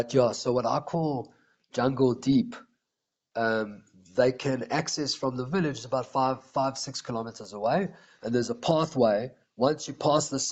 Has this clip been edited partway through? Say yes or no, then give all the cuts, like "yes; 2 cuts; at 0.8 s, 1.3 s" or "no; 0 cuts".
no; 0 cuts